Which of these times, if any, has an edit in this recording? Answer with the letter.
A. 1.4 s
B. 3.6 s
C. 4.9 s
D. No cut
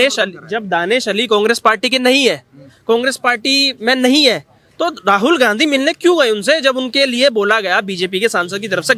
D